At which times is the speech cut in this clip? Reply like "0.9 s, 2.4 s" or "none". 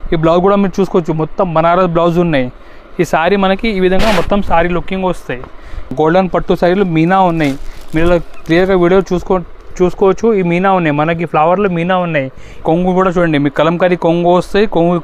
5.9 s, 12.4 s